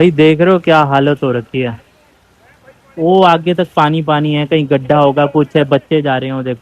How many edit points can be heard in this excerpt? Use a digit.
0